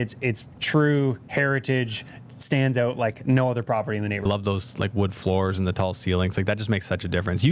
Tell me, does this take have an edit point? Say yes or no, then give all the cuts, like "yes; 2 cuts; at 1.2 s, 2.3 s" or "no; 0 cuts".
yes; 1 cut; at 4.2 s